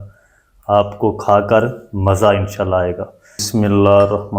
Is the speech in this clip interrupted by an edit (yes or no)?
yes